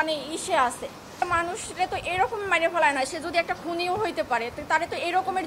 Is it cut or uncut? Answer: cut